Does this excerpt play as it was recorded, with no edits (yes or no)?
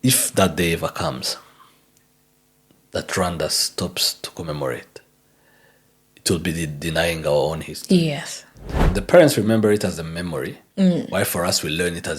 no